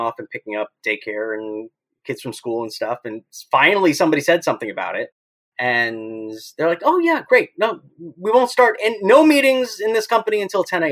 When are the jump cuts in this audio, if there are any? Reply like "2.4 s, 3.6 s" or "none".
none